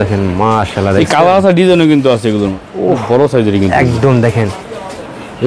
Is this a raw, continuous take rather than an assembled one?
no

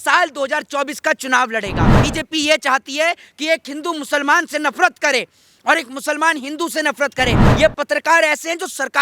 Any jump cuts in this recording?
yes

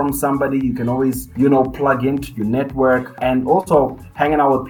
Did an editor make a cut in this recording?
yes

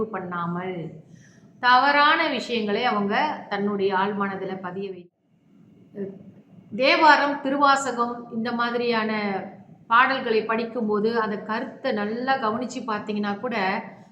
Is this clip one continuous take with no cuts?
no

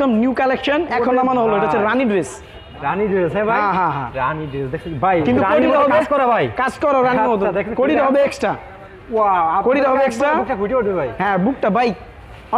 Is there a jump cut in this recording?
no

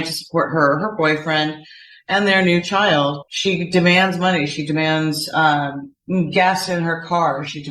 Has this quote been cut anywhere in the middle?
yes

